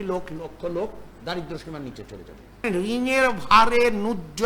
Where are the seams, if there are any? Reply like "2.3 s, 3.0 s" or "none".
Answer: 2.6 s